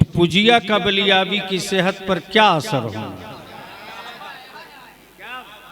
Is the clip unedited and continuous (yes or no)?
yes